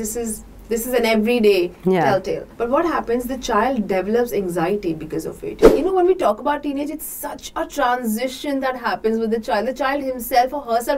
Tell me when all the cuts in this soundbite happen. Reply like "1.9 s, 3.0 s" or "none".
2.5 s, 5.7 s